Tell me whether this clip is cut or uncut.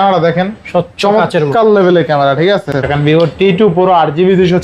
cut